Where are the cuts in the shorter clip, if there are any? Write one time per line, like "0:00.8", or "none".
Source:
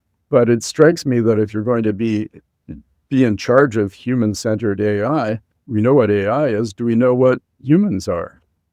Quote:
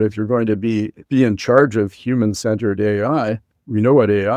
0:01.0